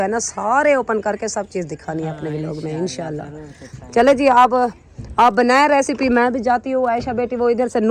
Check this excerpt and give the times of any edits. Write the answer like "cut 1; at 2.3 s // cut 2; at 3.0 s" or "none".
none